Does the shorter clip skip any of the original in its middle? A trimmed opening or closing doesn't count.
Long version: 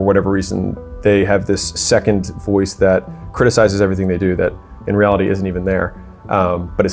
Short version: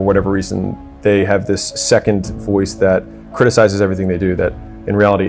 no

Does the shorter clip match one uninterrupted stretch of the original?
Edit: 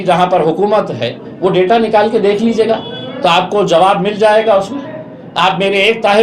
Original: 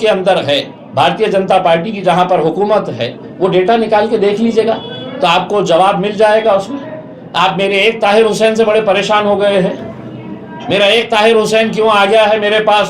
yes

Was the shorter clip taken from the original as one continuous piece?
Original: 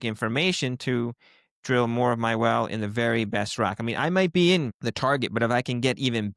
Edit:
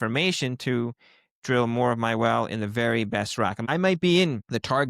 no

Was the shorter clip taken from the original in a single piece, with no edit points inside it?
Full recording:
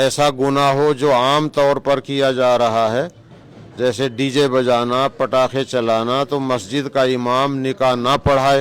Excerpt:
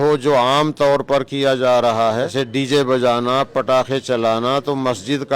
no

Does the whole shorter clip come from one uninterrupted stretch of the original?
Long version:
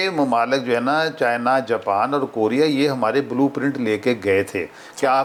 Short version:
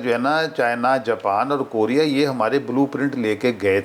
yes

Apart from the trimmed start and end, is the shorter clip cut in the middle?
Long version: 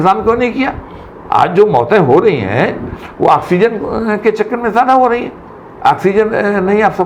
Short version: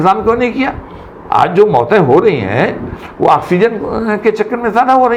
no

